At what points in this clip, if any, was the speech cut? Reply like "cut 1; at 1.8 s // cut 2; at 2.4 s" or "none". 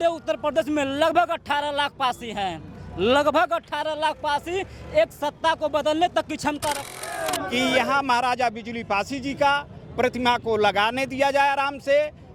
cut 1; at 7.0 s